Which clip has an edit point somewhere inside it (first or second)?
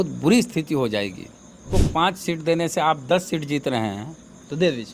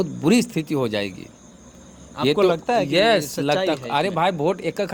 first